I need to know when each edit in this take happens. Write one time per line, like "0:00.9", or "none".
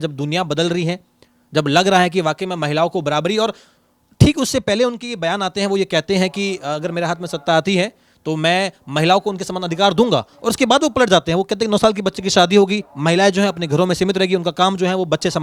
none